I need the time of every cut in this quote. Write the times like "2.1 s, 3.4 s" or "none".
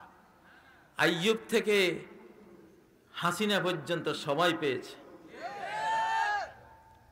none